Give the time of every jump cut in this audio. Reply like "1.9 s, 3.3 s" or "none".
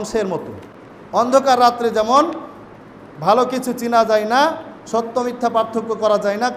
1.3 s